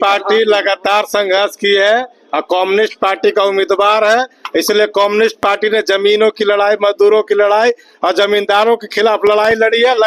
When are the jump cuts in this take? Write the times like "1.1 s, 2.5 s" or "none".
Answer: none